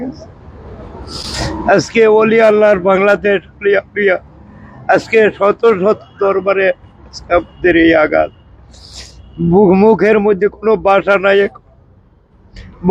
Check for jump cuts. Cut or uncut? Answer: uncut